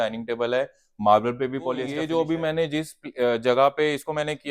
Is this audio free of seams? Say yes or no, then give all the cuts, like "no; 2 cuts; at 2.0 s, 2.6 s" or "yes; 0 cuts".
no; 1 cut; at 1.9 s